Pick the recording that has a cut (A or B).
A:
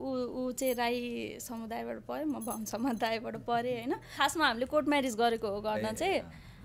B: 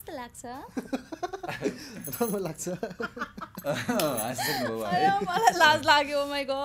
A